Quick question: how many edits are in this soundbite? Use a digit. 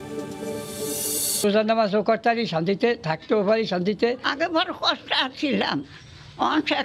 1